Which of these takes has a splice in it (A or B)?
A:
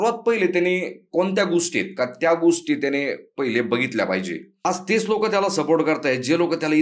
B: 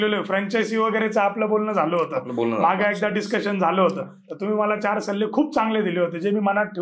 A